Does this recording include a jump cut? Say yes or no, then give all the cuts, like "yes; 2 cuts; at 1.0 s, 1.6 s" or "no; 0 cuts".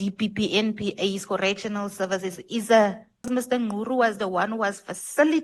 yes; 1 cut; at 3.3 s